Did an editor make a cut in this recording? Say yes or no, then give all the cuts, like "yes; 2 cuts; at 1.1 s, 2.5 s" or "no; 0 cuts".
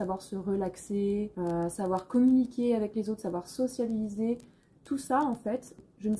no; 0 cuts